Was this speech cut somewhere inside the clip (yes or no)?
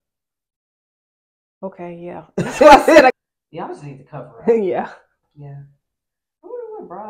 yes